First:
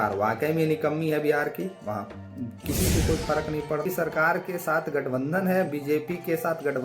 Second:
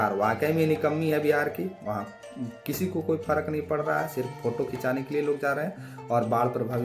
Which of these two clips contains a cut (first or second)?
first